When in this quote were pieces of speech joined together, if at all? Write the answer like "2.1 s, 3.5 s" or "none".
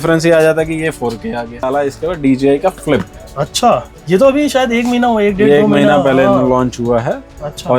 1.6 s